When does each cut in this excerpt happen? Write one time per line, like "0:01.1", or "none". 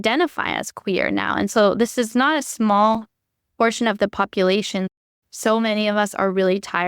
0:05.0